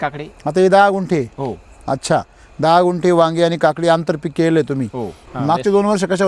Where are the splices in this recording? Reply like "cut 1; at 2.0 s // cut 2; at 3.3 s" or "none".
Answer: cut 1; at 5.2 s